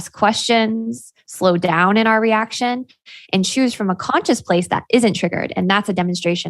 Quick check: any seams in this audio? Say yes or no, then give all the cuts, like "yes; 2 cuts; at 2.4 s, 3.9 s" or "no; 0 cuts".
no; 0 cuts